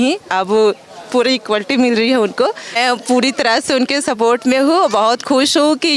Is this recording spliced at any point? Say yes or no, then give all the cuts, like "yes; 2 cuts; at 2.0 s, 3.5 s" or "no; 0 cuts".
yes; 1 cut; at 2.8 s